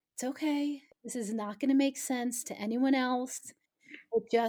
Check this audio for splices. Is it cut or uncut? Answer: cut